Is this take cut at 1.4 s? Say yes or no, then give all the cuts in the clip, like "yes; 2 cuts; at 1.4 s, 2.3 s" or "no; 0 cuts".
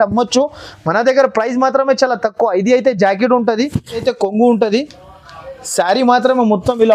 no; 1 cut; at 4.0 s